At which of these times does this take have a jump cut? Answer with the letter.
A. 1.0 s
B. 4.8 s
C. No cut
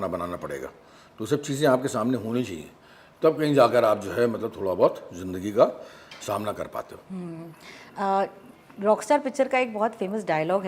C